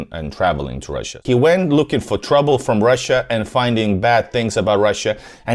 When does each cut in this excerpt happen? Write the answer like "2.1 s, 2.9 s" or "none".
1.2 s